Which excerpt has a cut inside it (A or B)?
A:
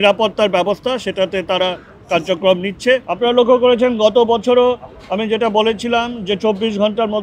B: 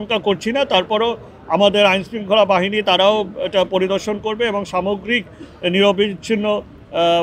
A